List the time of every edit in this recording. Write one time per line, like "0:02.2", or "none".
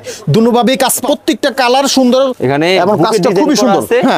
0:01.0
0:02.4

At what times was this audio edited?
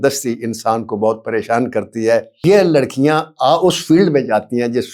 0:02.3

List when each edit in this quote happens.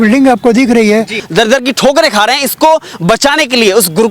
0:01.2

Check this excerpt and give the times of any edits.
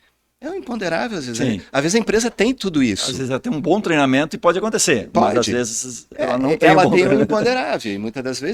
none

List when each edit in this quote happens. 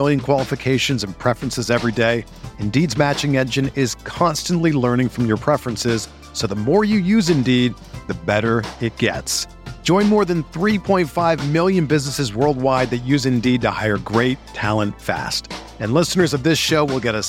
none

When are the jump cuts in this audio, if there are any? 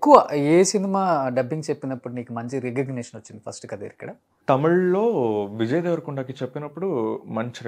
0:04.3

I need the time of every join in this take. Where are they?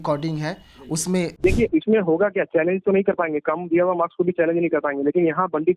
0:01.3

